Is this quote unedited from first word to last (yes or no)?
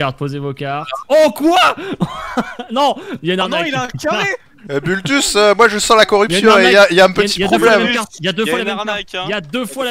no